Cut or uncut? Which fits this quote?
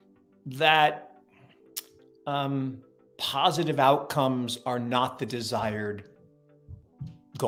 uncut